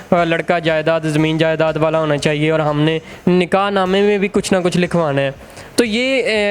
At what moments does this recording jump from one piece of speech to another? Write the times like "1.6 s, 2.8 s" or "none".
none